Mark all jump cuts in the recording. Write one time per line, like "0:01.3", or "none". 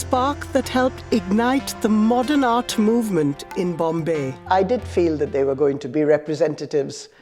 0:04.3
0:05.9